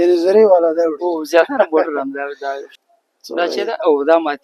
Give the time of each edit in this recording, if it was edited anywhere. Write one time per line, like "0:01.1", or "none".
0:02.7